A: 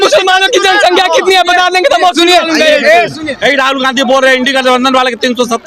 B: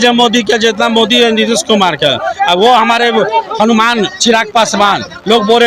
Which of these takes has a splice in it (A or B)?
A